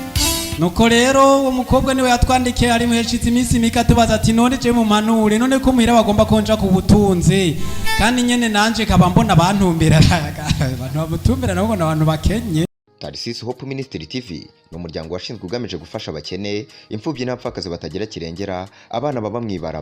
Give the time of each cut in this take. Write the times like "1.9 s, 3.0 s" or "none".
12.8 s